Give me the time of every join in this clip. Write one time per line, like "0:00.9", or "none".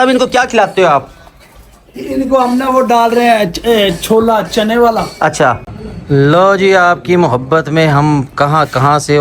0:05.6